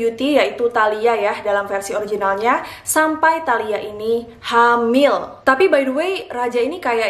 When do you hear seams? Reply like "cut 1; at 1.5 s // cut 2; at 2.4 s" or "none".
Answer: cut 1; at 5.3 s